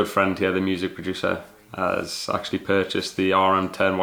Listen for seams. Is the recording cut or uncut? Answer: uncut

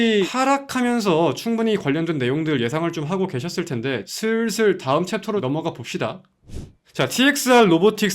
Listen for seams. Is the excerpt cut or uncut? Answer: cut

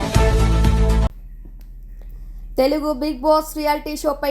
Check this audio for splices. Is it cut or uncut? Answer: cut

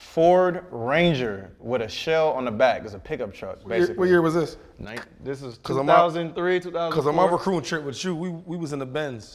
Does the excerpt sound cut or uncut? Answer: uncut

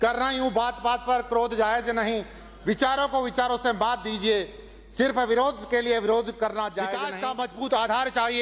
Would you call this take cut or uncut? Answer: cut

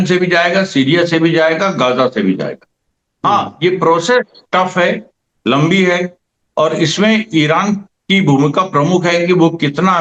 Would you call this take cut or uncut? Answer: uncut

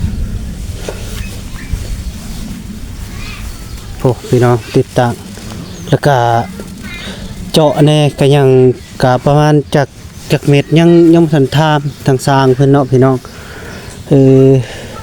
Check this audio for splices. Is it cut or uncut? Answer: uncut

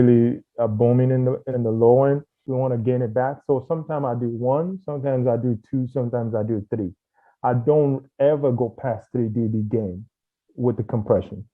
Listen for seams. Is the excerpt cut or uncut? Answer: cut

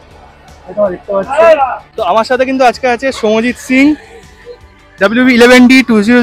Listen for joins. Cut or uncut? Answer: cut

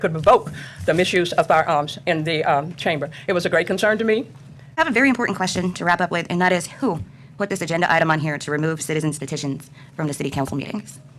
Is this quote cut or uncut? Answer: cut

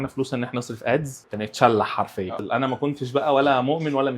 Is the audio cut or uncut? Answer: cut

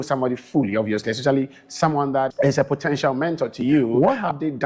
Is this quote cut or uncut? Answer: cut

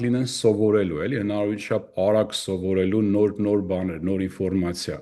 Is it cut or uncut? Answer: uncut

